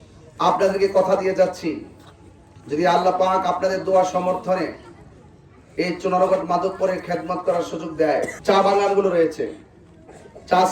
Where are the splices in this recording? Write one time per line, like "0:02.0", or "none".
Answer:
0:08.4